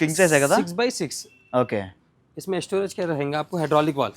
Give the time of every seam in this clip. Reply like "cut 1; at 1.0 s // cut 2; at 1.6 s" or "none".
none